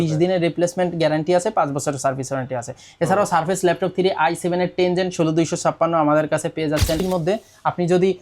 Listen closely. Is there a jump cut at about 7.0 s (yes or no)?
yes